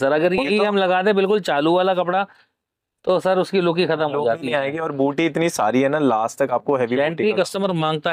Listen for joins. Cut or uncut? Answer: uncut